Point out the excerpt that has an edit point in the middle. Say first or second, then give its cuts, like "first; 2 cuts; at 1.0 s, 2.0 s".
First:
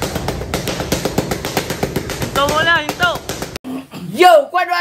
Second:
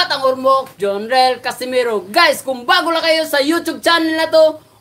first; 1 cut; at 3.6 s